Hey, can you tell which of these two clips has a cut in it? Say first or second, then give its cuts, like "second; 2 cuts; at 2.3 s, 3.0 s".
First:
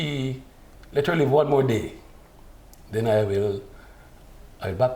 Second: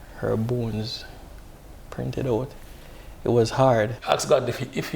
second; 1 cut; at 4.0 s